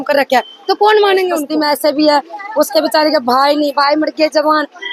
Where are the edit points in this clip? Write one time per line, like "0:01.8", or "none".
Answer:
0:01.4